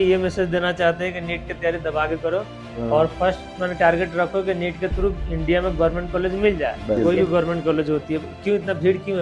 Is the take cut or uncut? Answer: cut